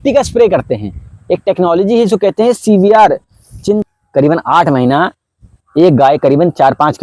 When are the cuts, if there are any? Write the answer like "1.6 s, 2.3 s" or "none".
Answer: 3.9 s